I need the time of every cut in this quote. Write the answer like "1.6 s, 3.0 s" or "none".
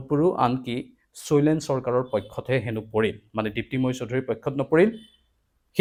none

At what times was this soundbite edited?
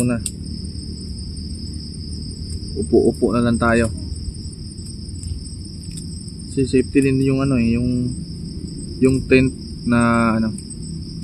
none

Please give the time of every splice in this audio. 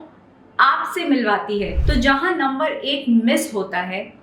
1.8 s

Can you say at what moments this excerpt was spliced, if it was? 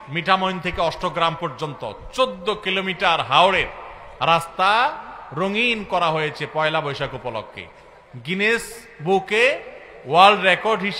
none

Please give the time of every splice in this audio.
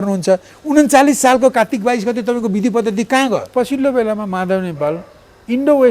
3.5 s

